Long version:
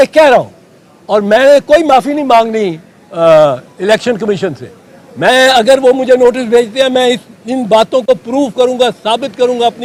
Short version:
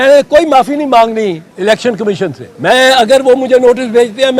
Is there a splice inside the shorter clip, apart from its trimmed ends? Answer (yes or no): yes